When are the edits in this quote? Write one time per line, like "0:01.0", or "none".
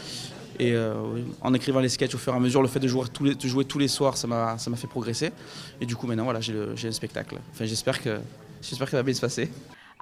none